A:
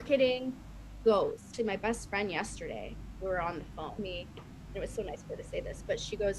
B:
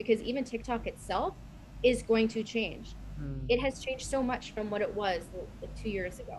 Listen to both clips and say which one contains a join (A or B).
A